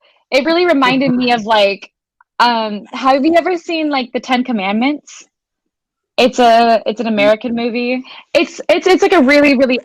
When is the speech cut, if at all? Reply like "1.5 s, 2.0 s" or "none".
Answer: 8.1 s

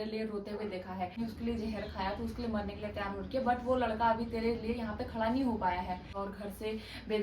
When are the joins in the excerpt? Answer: 1.2 s, 6.2 s

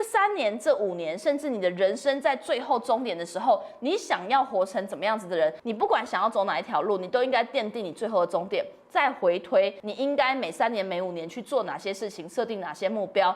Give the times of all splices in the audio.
5.6 s, 9.8 s

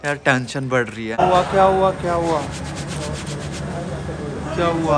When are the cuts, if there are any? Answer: 1.2 s

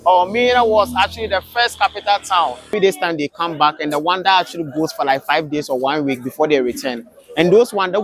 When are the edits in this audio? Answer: 2.7 s

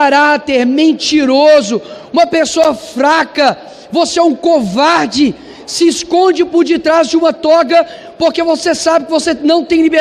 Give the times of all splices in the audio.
none

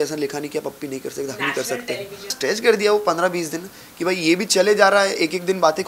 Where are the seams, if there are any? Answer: 2.3 s

